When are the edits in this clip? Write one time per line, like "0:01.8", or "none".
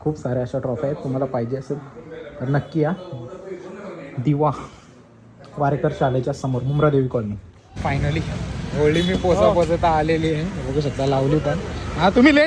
0:07.8